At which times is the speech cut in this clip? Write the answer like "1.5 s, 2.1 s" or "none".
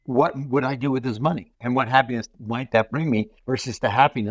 1.5 s, 3.4 s